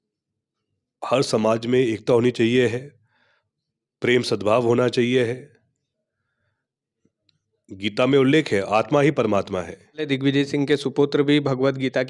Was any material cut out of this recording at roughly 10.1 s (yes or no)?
yes